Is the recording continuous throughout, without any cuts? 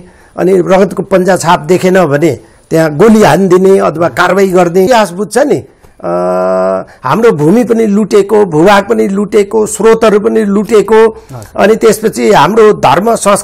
no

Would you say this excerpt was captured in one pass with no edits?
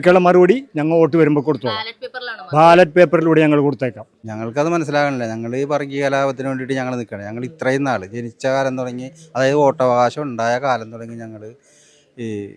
yes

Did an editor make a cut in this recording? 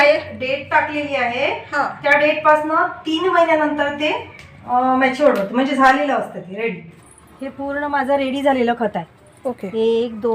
yes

